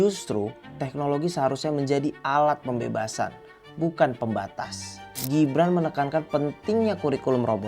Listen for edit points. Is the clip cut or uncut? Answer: cut